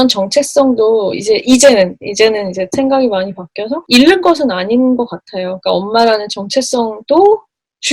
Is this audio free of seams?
no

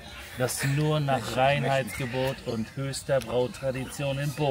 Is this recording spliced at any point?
no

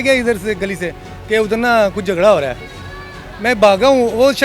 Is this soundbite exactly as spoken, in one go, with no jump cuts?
yes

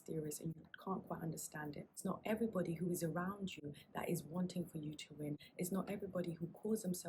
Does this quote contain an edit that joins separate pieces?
yes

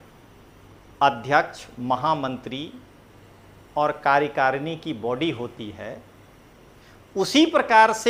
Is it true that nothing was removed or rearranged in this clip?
yes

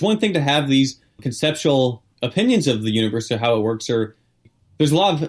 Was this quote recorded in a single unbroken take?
no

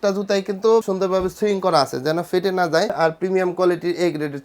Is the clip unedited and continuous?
no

